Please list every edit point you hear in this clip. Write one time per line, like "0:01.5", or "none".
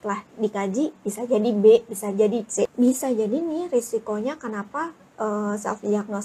0:02.7